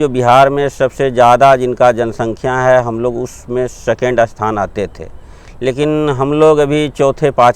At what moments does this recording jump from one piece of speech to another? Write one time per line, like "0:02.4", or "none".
none